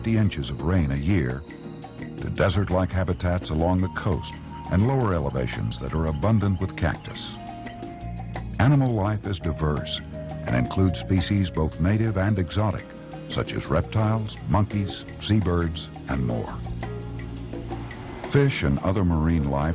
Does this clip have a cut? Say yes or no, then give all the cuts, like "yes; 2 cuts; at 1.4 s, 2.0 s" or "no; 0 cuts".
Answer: yes; 1 cut; at 15.1 s